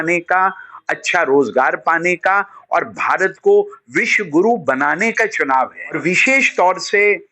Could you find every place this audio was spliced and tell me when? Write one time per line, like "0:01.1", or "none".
0:06.0